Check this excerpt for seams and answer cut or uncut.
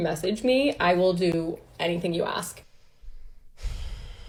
uncut